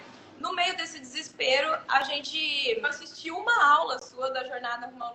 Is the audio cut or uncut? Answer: cut